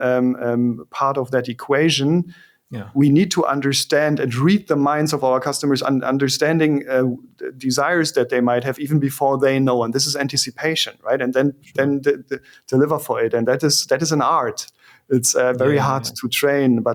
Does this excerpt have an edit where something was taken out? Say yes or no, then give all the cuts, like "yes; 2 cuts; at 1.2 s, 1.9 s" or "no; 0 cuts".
no; 0 cuts